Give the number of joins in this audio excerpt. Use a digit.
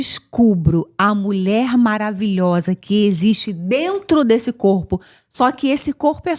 0